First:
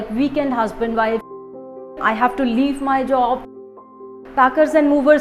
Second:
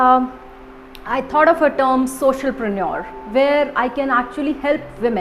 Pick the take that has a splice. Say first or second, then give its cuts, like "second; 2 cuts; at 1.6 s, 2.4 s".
first; 2 cuts; at 1.9 s, 3.9 s